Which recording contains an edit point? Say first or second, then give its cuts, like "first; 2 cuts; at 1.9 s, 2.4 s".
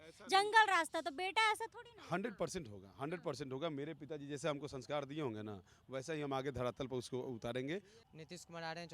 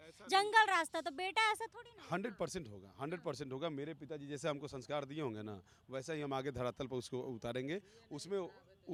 first; 1 cut; at 8.0 s